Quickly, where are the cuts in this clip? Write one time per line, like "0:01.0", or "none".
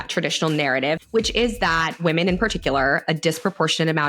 0:01.0
0:02.0